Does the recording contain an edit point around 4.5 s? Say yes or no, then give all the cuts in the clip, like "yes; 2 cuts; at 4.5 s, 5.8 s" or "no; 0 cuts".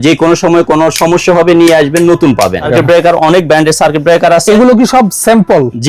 no; 1 cut; at 2.6 s